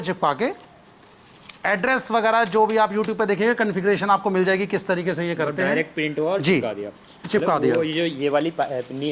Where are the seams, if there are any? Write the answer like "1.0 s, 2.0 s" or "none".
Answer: none

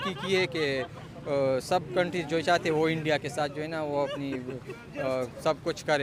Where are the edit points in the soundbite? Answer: none

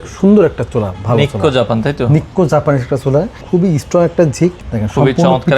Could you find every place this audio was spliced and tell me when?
3.4 s, 4.6 s

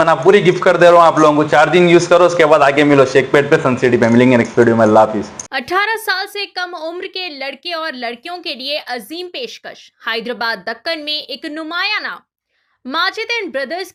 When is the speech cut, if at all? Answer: none

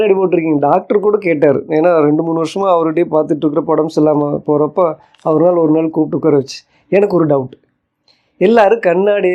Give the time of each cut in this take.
none

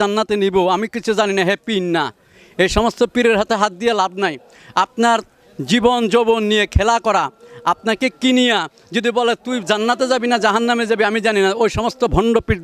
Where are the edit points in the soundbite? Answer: none

